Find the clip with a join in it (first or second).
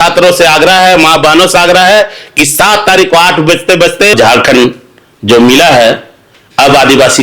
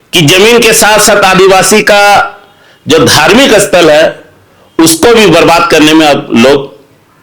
first